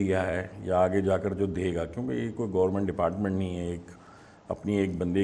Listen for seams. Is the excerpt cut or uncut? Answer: uncut